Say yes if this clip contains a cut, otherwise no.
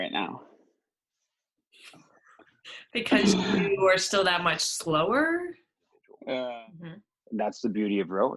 yes